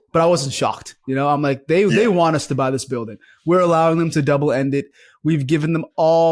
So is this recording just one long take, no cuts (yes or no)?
yes